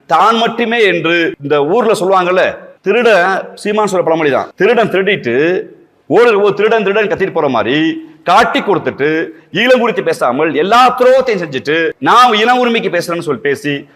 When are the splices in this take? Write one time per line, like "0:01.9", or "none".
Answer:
0:01.4
0:02.7
0:04.5
0:12.0